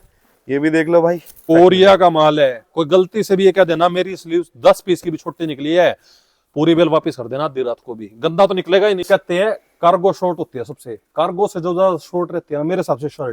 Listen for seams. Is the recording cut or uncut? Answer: cut